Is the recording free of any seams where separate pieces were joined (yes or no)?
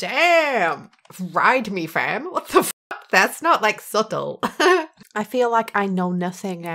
no